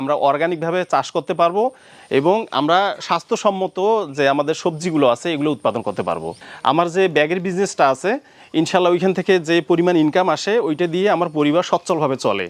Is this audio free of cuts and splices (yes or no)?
no